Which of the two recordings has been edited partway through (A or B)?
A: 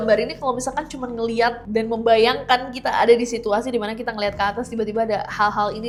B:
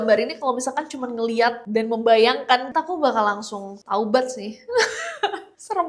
B